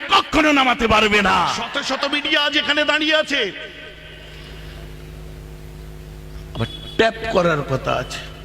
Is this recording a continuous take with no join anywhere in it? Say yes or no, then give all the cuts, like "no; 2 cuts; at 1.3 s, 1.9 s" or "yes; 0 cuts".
no; 1 cut; at 1.7 s